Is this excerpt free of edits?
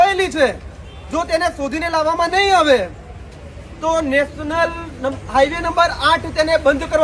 yes; 0 cuts

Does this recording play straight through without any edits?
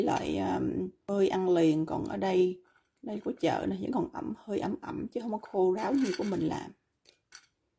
no; 1 cut; at 1.0 s

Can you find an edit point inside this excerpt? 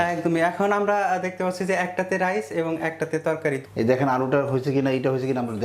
yes; 1 cut; at 3.6 s

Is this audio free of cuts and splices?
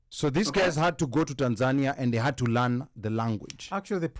yes; 0 cuts

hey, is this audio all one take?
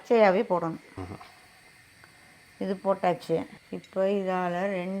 no; 2 cuts; at 1.0 s, 3.5 s

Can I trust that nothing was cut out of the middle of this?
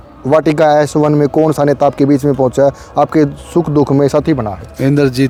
yes; 0 cuts

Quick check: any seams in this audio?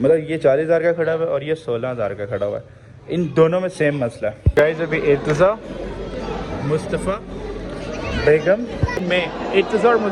yes; 1 cut; at 4.4 s

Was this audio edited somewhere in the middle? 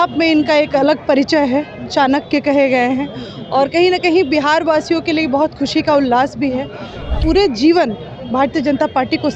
yes; 1 cut; at 7.2 s

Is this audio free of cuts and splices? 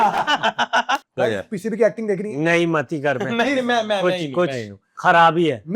no; 1 cut; at 1.0 s

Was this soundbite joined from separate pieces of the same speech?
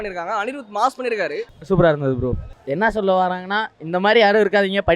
yes; 2 cuts; at 1.5 s, 2.5 s

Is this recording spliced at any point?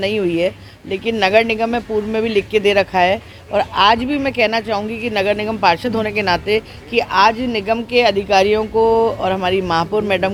no; 0 cuts

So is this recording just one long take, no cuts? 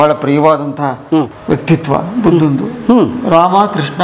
yes; 0 cuts

